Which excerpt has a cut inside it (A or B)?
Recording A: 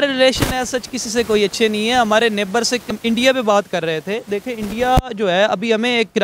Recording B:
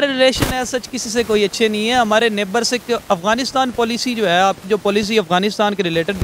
A